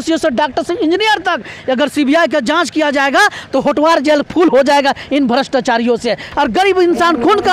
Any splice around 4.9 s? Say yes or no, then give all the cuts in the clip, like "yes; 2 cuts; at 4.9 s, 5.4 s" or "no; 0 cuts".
no; 1 cut; at 6.3 s